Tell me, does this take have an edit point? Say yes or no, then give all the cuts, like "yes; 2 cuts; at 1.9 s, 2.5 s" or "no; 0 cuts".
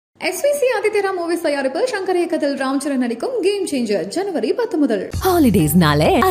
no; 0 cuts